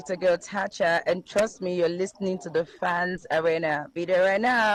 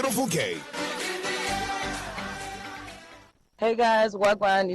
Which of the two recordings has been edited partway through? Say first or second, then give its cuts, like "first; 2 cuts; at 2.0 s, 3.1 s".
second; 1 cut; at 3.2 s